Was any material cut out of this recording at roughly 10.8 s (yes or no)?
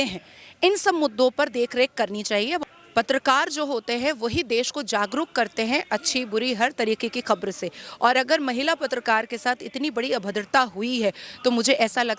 no